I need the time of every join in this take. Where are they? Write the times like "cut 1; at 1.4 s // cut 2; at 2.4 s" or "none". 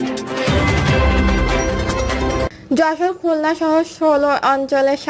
none